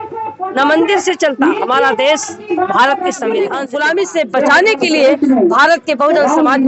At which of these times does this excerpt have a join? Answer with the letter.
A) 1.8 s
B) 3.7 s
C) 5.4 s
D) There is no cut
B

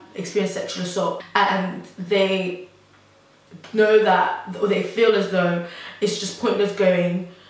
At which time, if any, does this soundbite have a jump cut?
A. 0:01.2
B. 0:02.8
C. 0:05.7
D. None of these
A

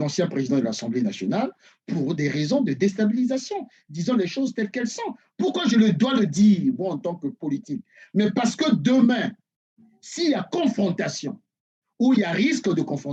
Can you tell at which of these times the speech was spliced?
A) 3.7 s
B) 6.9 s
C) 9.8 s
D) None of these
D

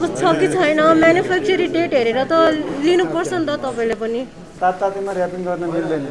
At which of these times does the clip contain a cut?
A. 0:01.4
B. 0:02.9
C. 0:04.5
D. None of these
C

